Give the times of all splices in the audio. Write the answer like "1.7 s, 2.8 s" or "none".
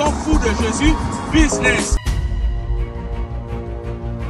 1.9 s